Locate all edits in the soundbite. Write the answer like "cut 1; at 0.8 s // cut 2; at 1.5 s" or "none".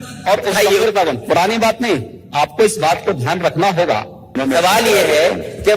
cut 1; at 4.3 s